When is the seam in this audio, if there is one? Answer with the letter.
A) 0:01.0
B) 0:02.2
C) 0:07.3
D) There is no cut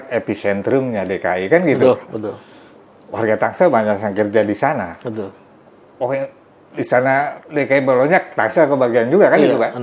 D